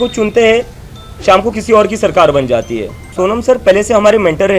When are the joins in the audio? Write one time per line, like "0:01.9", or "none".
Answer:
0:03.0